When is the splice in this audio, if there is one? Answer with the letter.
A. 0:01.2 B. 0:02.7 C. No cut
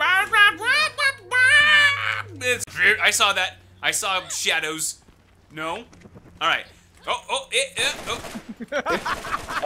B